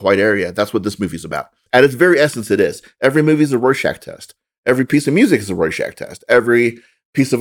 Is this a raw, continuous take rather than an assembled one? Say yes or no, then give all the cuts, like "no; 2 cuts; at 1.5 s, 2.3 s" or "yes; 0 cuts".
no; 1 cut; at 1.6 s